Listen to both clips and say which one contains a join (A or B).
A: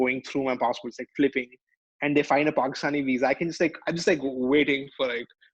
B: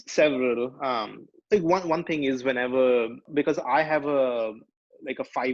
B